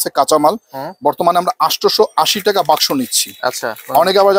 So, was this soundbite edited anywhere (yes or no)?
no